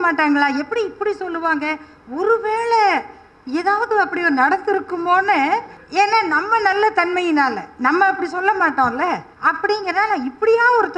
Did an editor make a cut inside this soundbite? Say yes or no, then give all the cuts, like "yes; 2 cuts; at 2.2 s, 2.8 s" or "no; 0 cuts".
yes; 2 cuts; at 5.8 s, 9.3 s